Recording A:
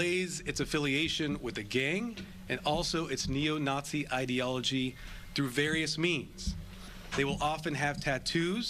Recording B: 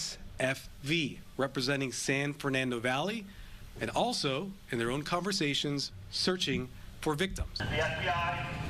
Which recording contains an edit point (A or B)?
B